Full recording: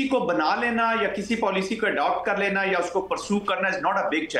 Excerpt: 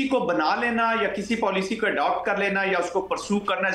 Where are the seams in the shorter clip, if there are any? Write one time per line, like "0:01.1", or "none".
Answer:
none